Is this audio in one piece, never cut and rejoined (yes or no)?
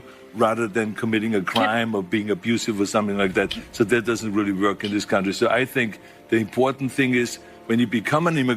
yes